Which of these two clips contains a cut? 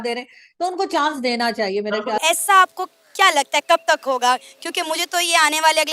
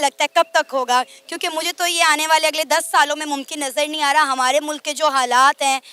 first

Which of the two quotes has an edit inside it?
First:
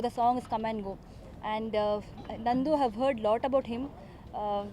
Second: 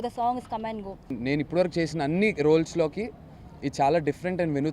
second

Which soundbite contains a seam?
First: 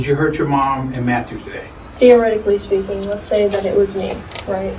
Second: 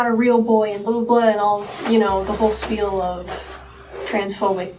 first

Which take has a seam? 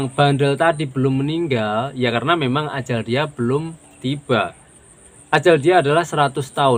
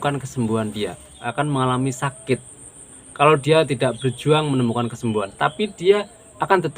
second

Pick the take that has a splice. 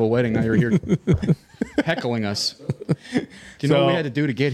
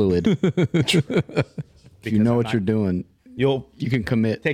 second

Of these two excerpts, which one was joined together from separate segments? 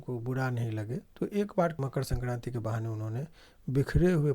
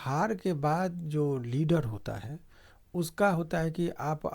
first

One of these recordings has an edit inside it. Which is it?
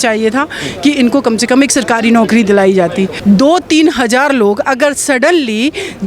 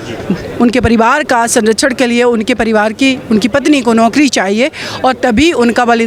first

